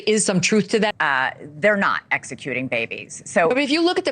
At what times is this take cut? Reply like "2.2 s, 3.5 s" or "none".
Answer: 0.9 s